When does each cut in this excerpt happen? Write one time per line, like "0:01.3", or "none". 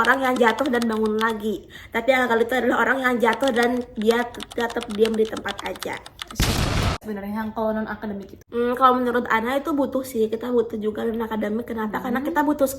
0:07.0
0:08.3